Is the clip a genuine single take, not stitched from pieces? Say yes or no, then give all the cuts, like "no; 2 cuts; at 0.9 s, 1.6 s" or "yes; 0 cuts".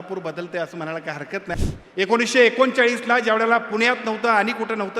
no; 1 cut; at 1.5 s